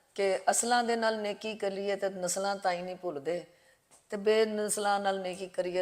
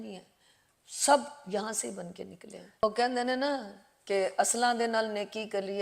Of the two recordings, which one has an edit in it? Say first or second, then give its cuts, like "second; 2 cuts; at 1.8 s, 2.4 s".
second; 1 cut; at 2.6 s